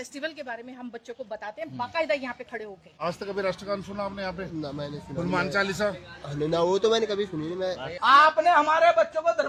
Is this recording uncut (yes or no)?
yes